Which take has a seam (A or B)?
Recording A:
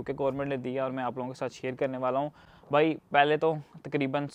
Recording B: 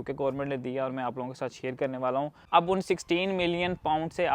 B